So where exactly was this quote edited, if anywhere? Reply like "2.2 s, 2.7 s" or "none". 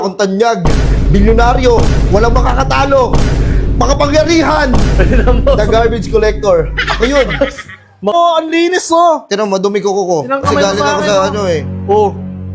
8.1 s